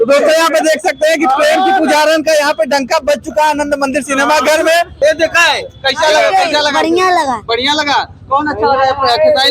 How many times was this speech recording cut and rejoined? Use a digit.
1